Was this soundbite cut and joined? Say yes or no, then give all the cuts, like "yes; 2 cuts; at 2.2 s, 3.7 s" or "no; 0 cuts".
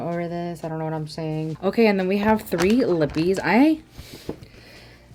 no; 0 cuts